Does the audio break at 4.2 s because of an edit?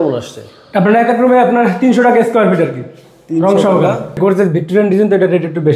yes; 1 cut; at 4.2 s

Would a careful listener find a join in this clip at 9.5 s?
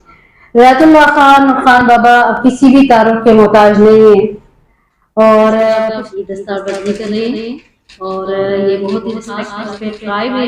yes; 2 cuts; at 6.0 s, 9.5 s

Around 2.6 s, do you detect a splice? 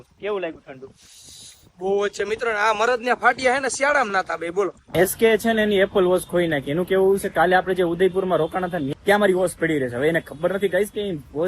no; 2 cuts; at 4.8 s, 8.9 s

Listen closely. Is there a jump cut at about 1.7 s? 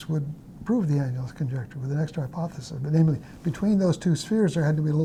no; 0 cuts

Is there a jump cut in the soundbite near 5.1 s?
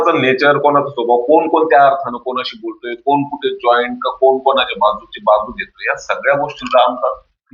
no; 0 cuts

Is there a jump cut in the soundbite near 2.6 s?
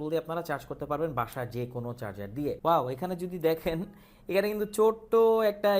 yes; 1 cut; at 2.6 s

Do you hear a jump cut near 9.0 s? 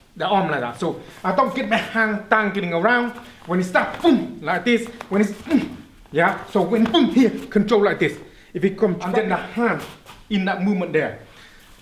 yes; 1 cut; at 9.0 s

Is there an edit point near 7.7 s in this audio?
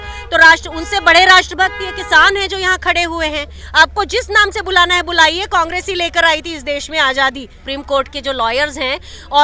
yes; 2 cuts; at 3.6 s, 7.7 s

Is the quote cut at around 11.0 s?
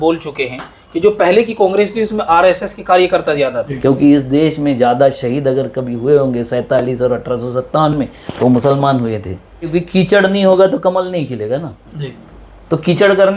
no; 2 cuts; at 3.7 s, 9.7 s

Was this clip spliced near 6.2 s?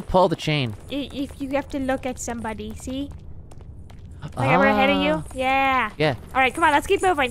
yes; 1 cut; at 6.2 s

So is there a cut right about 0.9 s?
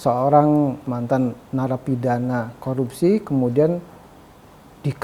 yes; 1 cut; at 0.9 s

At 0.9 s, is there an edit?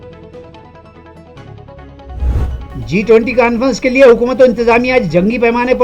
no; 1 cut; at 2.4 s

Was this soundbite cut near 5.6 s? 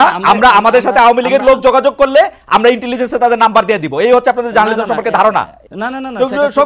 yes; 1 cut; at 5.6 s

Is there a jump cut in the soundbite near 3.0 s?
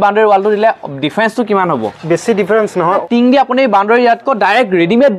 yes; 1 cut; at 3.0 s

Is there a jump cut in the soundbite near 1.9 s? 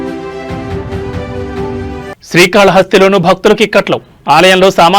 yes; 1 cut; at 1.9 s

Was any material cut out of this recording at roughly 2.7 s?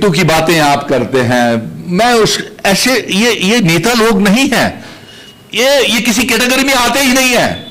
no; 0 cuts

